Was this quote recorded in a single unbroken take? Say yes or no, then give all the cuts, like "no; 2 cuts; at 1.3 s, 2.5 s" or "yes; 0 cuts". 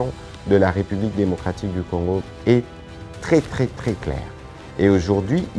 no; 1 cut; at 2.2 s